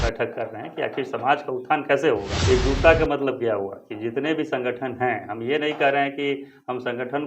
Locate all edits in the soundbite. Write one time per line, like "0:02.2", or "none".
0:02.3